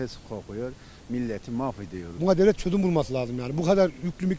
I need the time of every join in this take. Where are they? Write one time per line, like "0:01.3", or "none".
0:02.1